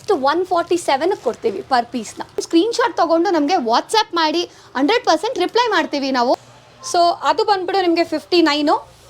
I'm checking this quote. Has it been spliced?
yes; 2 cuts; at 2.4 s, 6.3 s

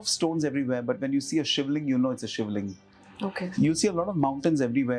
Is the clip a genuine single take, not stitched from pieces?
yes; 0 cuts

